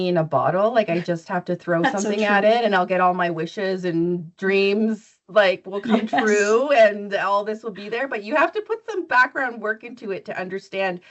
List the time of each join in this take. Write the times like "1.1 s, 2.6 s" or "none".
none